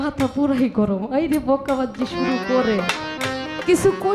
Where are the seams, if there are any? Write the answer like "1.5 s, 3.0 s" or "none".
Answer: none